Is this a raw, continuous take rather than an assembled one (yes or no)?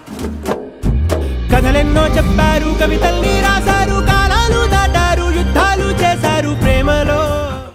yes